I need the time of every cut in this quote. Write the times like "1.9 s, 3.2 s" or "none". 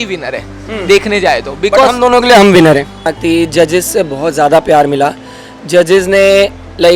3.1 s